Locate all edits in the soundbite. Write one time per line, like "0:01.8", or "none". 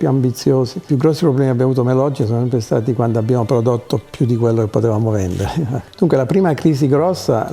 0:00.9
0:05.8